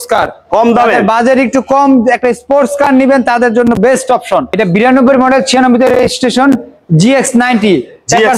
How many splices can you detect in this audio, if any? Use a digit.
1